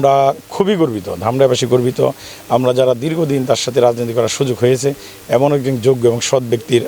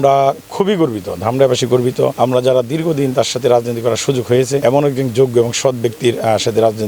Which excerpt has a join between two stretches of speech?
second; 2 cuts; at 2.1 s, 4.6 s

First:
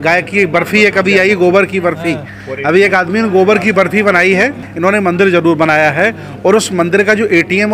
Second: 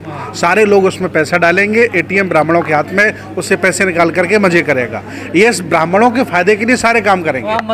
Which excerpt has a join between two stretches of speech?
first; 1 cut; at 4.6 s

